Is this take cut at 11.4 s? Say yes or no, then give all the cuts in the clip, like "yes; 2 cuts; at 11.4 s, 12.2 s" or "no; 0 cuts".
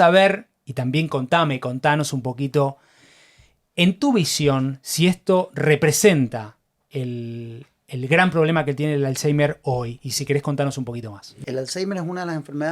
yes; 1 cut; at 11.4 s